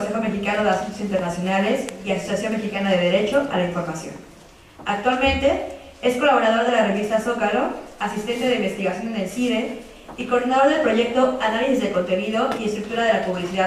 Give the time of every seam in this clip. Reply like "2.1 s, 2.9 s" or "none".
11.1 s